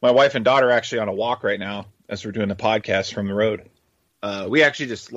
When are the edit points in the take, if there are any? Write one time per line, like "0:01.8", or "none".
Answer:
0:04.1